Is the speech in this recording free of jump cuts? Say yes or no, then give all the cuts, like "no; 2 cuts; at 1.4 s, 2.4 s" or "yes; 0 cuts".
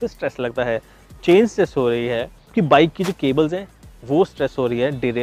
yes; 0 cuts